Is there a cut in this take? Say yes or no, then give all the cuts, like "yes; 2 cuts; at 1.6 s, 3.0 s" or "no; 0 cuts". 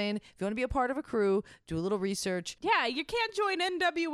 yes; 1 cut; at 2.5 s